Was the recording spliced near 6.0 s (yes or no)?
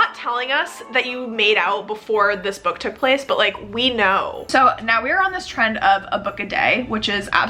no